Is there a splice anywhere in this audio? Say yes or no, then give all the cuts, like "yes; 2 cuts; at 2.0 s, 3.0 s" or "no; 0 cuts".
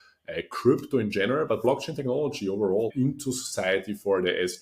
yes; 1 cut; at 2.9 s